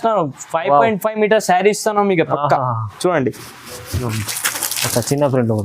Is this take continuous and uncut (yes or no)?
no